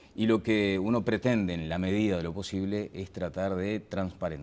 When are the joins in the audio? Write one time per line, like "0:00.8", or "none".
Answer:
0:02.9